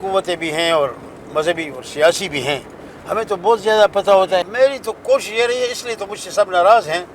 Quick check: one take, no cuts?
no; 1 cut; at 4.5 s

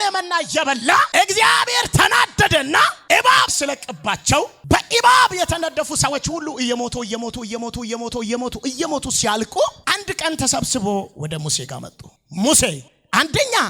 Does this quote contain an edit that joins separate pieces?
yes; 1 cut; at 1.1 s

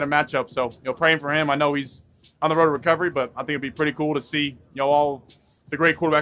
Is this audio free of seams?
yes; 0 cuts

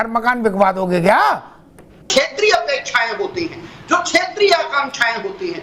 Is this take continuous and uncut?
no; 1 cut; at 2.1 s

